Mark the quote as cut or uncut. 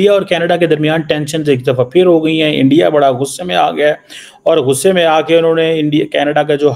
uncut